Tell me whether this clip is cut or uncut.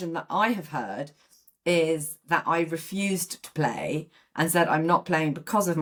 uncut